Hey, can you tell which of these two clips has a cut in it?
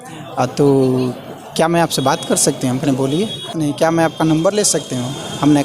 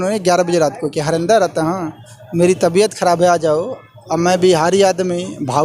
first; 1 cut; at 3.5 s

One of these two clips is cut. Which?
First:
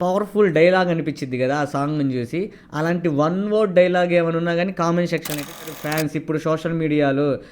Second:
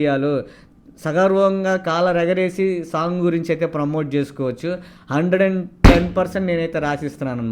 first; 1 cut; at 5.7 s

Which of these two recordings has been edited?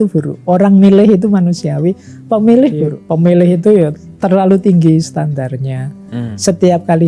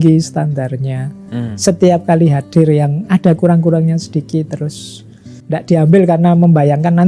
first; 1 cut; at 2.9 s

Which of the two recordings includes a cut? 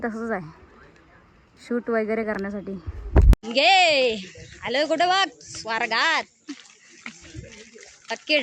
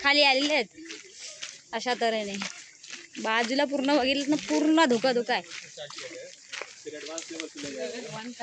first; 1 cut; at 3.4 s

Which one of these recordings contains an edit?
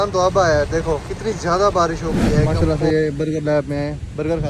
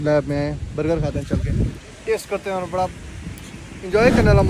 first; 2 cuts; at 1.1 s, 2.5 s

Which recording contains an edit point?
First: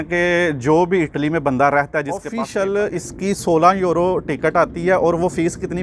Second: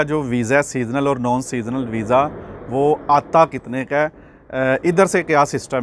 first; 1 cut; at 2.3 s

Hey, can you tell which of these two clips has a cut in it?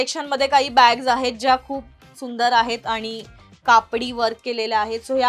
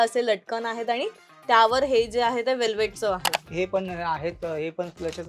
second; 1 cut; at 3.4 s

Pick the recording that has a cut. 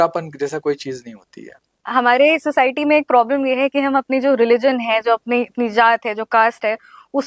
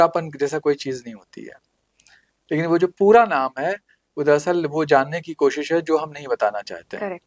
first; 1 cut; at 1.7 s

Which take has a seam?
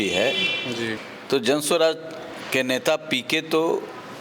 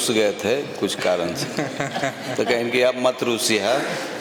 first; 1 cut; at 1.0 s

